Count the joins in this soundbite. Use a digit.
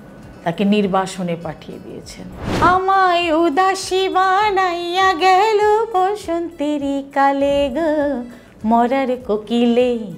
1